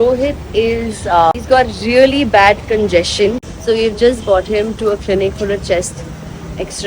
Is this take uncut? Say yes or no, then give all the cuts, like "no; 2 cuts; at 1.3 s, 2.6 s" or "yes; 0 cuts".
no; 2 cuts; at 1.3 s, 3.5 s